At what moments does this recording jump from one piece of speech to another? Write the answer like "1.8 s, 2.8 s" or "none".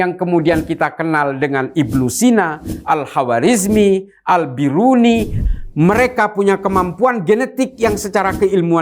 5.3 s